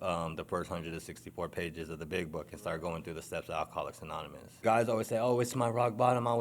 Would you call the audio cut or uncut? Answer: cut